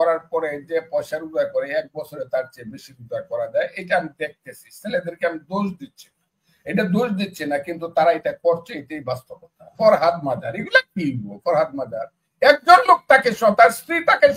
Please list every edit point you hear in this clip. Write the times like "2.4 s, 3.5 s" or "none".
9.7 s